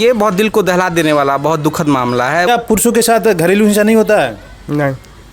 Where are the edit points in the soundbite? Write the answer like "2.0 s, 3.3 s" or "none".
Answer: 2.5 s